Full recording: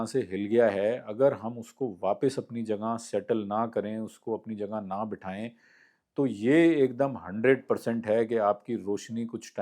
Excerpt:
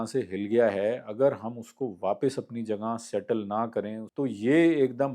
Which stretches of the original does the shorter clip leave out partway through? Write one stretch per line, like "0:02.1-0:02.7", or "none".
0:04.0-0:06.0